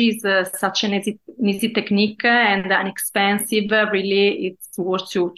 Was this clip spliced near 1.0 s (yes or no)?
no